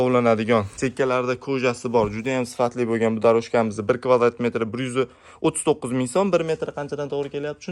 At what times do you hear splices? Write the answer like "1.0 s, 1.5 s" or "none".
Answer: none